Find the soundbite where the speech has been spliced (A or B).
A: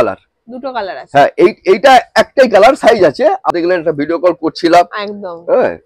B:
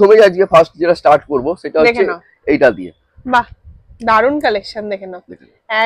A